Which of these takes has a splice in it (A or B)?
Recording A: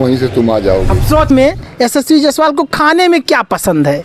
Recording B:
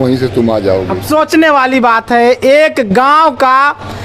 A